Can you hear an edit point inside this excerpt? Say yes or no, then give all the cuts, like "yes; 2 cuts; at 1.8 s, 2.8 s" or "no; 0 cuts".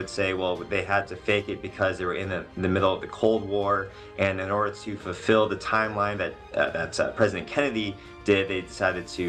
no; 0 cuts